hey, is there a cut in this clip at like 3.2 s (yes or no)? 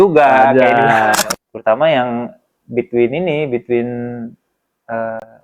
no